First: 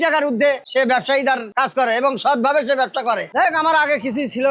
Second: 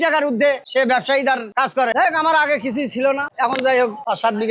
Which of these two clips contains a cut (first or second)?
second